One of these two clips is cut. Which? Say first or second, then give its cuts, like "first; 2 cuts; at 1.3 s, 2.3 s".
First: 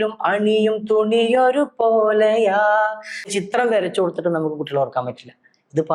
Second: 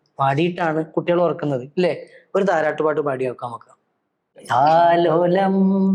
first; 1 cut; at 3.3 s